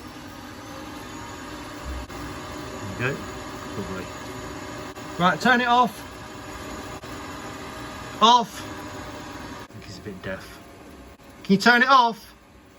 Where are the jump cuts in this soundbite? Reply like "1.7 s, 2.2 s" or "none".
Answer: 2.1 s, 4.9 s, 7.0 s, 9.7 s, 11.2 s

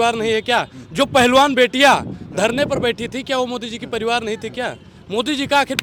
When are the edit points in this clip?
none

